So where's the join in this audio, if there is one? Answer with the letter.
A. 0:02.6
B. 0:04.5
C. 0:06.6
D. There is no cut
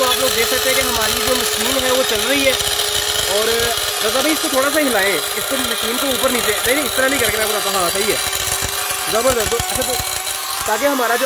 D